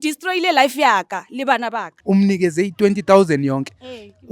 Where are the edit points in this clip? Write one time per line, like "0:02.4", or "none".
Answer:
0:01.9